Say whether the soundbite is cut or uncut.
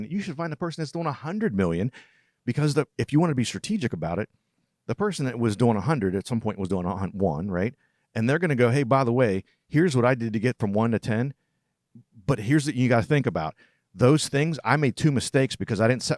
uncut